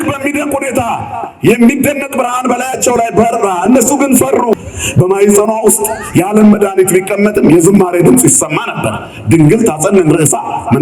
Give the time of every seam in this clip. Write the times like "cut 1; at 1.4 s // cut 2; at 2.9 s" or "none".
cut 1; at 4.5 s